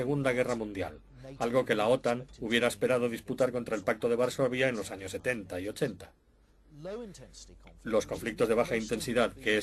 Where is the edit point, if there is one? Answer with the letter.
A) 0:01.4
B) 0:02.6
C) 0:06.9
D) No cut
B